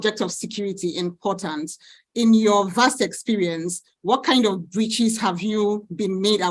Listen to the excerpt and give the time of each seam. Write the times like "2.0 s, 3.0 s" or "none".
none